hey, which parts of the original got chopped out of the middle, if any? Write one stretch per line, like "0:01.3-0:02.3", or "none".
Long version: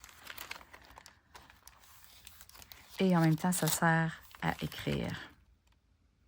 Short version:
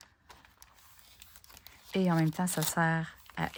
none

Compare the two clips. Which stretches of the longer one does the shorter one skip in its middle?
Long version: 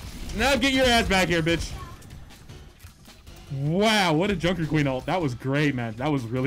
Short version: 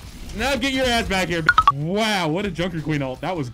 0:01.4-0:03.3

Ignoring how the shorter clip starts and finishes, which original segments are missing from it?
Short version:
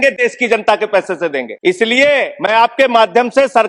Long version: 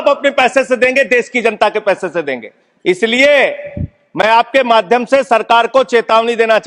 0:02.4-0:02.7
0:03.6-0:04.1

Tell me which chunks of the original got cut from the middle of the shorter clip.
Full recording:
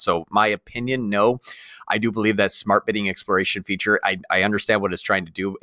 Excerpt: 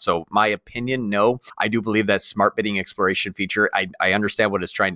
0:01.5-0:01.8

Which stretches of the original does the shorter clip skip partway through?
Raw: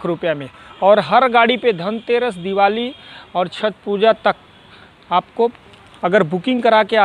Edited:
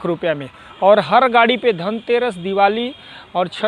none

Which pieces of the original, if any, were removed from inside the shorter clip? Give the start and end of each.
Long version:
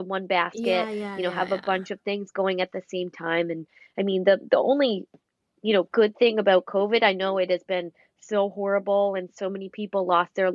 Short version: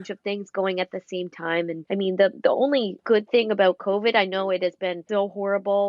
0:03.6-0:03.9
0:05.1-0:05.9
0:07.9-0:08.2

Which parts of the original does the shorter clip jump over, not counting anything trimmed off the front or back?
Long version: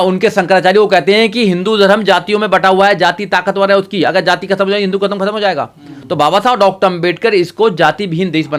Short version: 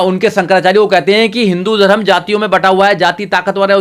none

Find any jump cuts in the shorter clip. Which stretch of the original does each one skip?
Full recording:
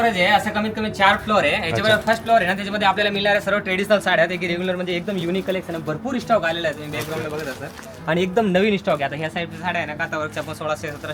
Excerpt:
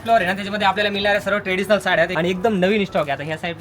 0:04.3-0:08.0

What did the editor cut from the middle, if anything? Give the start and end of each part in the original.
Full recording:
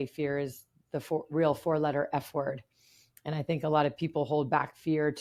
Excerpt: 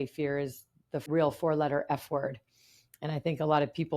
0:01.0-0:01.3

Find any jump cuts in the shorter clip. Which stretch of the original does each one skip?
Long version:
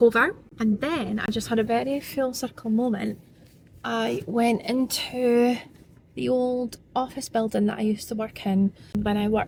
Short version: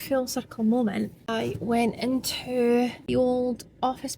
0:03.3-0:03.9
0:05.7-0:06.1

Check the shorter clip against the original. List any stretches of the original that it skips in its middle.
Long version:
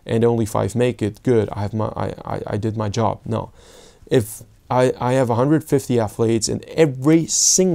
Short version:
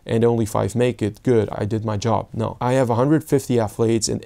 0:01.5-0:02.5
0:03.5-0:05.0

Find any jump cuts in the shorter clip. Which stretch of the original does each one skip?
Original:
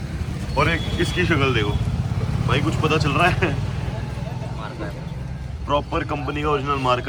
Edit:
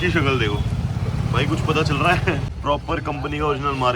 0:03.7-0:05.5

